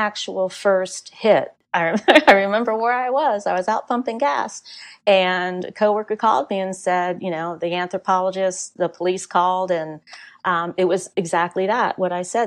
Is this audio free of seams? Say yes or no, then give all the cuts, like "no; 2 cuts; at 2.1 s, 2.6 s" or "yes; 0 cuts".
no; 1 cut; at 1.6 s